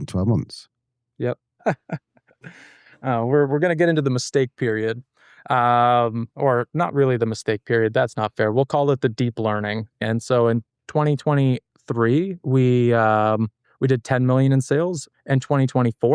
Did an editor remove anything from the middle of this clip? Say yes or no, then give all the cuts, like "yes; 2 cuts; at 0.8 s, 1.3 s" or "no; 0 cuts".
yes; 3 cuts; at 1.6 s, 10.0 s, 15.0 s